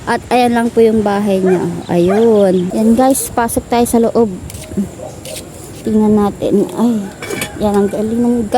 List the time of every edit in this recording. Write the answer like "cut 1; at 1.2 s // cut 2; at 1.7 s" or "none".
cut 1; at 2.7 s